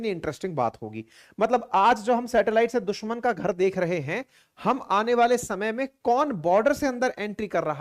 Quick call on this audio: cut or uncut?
uncut